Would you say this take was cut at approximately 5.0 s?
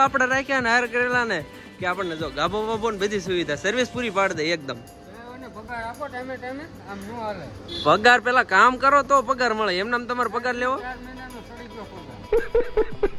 no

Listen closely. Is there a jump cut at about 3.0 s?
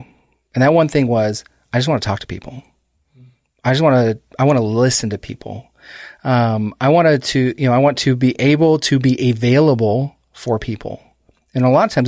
no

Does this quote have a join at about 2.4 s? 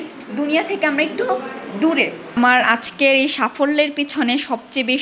yes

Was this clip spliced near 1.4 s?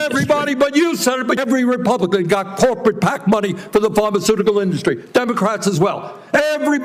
yes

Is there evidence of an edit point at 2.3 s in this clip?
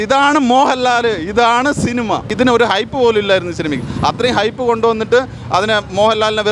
yes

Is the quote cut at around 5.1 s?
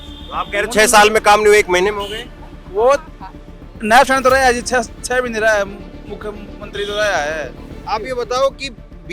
no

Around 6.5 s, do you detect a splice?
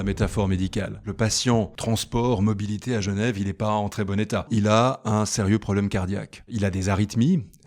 yes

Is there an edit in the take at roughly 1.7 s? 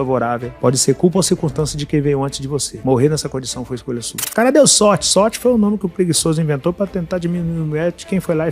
no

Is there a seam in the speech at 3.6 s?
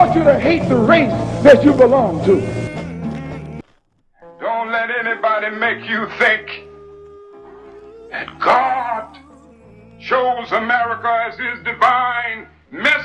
yes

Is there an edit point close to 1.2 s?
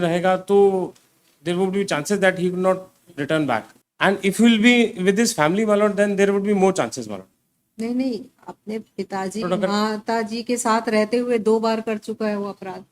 no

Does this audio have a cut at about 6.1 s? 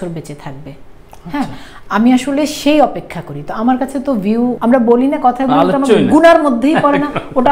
no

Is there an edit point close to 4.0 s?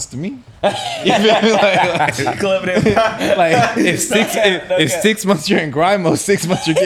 no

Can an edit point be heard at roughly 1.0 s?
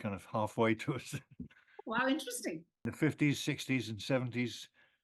no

